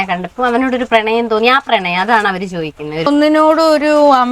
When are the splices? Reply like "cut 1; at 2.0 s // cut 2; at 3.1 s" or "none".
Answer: cut 1; at 3.1 s